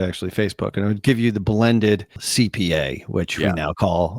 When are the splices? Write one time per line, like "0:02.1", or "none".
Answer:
0:02.2